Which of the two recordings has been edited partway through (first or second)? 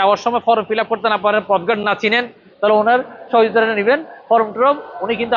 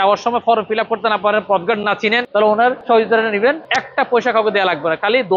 second